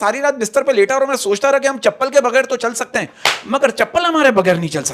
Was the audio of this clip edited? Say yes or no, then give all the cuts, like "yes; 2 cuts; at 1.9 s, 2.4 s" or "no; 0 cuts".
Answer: no; 0 cuts